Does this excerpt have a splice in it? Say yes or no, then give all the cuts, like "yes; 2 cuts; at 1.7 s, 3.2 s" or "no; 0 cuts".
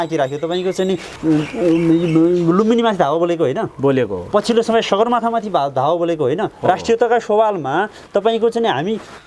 no; 0 cuts